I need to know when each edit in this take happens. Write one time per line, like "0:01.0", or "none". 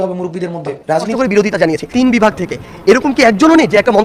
0:01.1

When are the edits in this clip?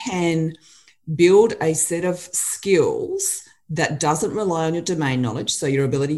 none

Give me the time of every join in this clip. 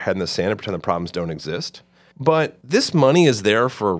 0:02.4

